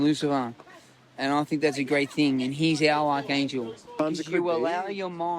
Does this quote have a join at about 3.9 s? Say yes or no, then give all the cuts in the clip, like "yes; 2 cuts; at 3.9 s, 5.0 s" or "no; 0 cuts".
yes; 1 cut; at 3.9 s